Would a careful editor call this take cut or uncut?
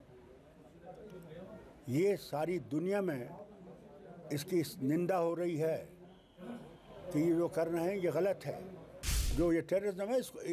cut